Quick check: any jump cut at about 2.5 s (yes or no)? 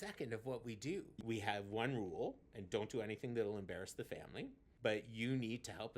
no